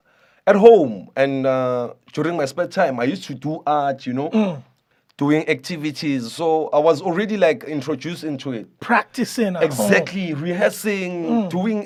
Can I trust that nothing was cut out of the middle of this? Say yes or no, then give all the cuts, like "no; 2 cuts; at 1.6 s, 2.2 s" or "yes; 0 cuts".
yes; 0 cuts